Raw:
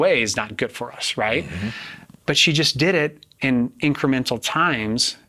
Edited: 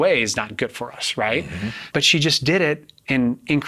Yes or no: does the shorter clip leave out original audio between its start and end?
yes